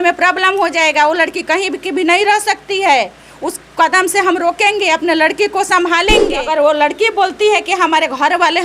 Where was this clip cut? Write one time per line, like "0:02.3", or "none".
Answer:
0:06.4